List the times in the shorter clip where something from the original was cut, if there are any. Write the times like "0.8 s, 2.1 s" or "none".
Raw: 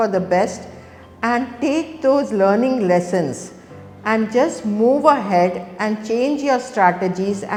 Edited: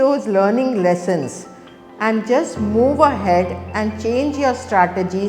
none